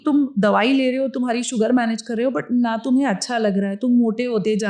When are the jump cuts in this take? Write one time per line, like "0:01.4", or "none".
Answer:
none